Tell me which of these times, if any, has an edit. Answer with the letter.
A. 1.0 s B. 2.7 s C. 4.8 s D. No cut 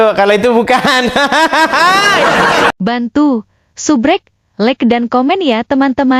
B